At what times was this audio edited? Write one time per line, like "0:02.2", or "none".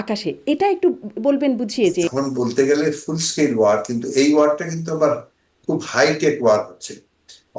0:02.1

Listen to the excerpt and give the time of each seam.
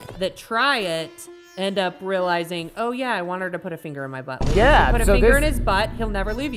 none

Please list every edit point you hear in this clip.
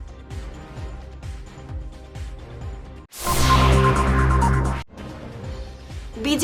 0:04.8

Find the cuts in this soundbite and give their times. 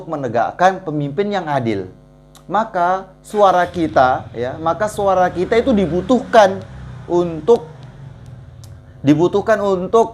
none

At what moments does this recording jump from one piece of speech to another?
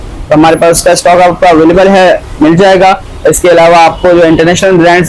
none

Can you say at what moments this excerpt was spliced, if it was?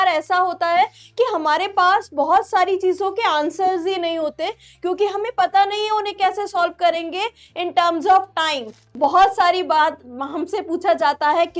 0:08.8

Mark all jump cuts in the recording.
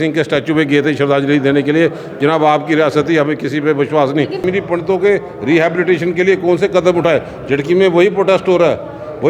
0:04.4

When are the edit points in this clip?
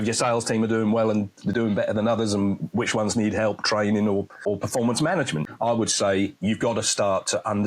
0:04.3
0:05.4

